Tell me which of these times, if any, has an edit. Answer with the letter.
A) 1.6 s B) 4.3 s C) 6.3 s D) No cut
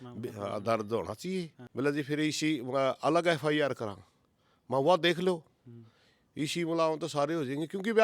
A